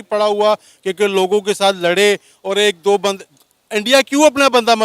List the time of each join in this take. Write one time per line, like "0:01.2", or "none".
none